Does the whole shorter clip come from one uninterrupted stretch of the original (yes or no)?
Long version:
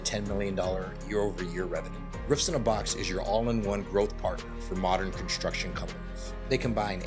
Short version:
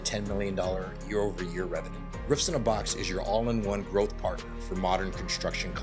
yes